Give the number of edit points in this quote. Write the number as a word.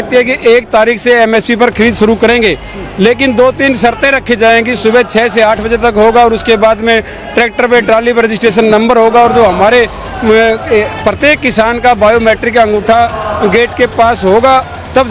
zero